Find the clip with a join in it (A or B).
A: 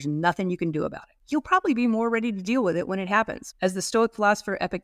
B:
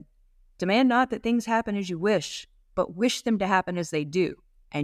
A